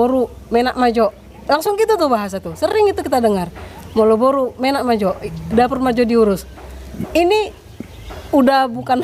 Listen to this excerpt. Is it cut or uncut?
uncut